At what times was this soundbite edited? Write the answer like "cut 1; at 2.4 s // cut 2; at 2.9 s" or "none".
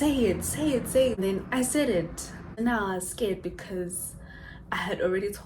cut 1; at 1.2 s // cut 2; at 2.5 s